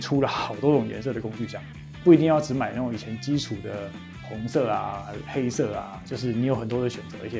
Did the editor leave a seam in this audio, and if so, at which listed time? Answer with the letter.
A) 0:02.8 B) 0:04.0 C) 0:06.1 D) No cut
D